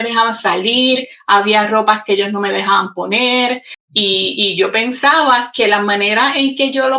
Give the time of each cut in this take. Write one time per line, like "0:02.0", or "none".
0:03.7